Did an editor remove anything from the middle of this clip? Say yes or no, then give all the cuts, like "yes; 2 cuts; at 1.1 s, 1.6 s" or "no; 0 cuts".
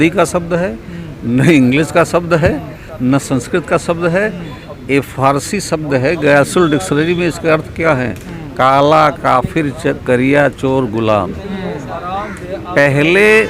no; 0 cuts